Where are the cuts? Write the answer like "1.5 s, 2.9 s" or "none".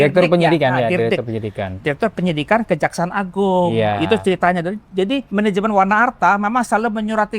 none